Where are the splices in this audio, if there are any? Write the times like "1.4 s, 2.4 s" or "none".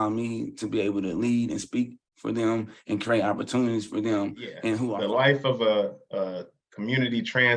4.9 s